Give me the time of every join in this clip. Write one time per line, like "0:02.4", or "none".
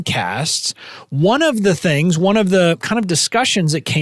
0:02.8